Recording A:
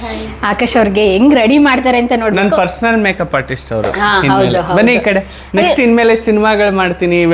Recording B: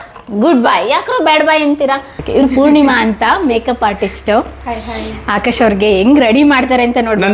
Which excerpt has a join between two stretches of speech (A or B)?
B